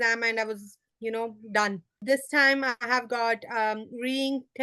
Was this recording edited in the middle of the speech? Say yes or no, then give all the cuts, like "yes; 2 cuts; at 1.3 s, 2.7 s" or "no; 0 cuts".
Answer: yes; 1 cut; at 2.0 s